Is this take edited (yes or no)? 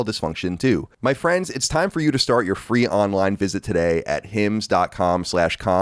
yes